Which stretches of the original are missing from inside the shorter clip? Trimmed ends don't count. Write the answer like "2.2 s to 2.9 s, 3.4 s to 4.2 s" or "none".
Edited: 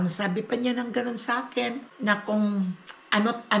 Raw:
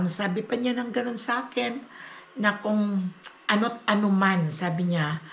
1.9 s to 2.2 s